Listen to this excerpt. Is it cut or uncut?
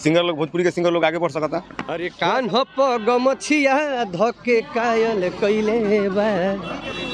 cut